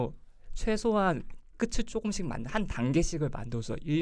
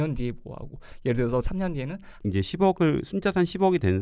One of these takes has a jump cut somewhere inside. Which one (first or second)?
second